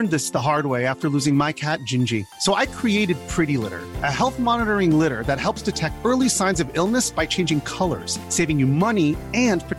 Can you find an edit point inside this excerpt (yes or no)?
no